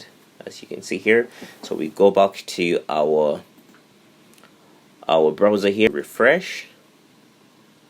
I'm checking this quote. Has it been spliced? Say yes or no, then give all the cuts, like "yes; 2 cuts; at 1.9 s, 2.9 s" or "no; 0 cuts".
yes; 1 cut; at 5.9 s